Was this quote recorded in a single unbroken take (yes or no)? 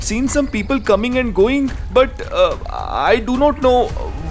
no